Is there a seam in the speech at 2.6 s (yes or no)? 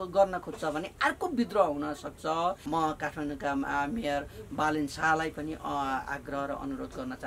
yes